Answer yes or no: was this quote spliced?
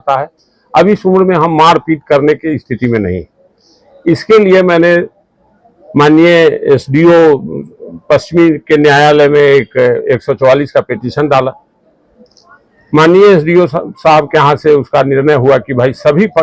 no